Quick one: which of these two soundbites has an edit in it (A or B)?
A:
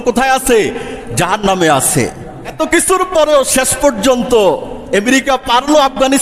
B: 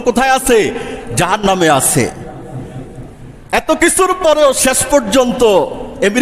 A